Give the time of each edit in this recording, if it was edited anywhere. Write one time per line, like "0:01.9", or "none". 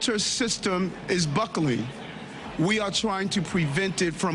none